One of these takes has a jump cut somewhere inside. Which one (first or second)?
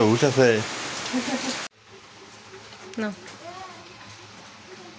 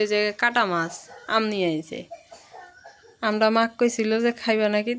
first